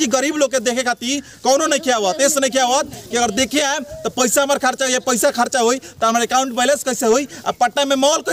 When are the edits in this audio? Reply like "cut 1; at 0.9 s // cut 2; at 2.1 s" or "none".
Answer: none

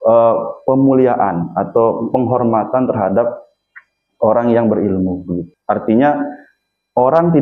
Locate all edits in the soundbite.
cut 1; at 5.5 s

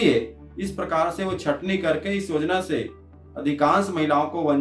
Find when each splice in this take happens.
none

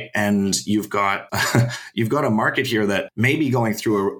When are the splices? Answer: cut 1; at 1.2 s // cut 2; at 3.1 s

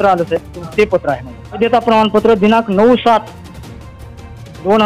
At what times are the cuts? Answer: cut 1; at 1.6 s

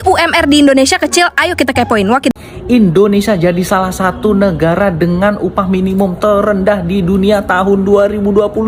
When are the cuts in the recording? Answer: cut 1; at 2.3 s

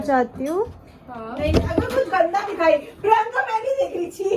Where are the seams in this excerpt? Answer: none

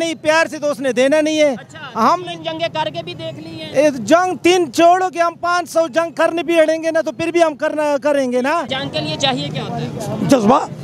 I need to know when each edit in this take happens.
cut 1; at 8.7 s

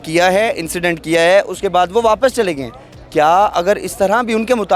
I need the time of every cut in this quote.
none

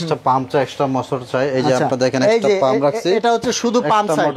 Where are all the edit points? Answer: none

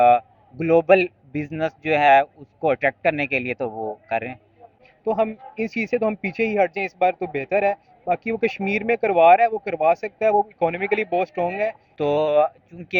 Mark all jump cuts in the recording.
cut 1; at 4.8 s // cut 2; at 11.8 s

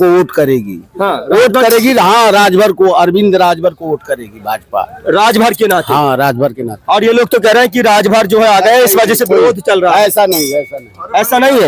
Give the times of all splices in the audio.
none

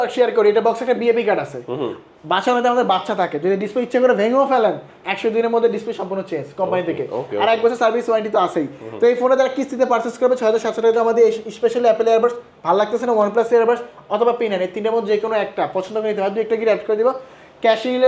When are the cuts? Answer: none

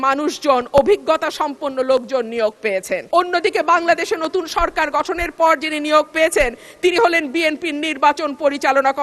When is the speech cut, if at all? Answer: cut 1; at 3.0 s

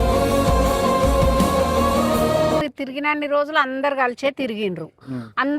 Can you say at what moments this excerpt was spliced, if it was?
cut 1; at 2.7 s

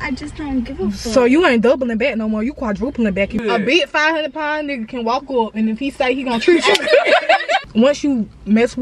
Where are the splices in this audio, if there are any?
cut 1; at 3.3 s // cut 2; at 7.7 s

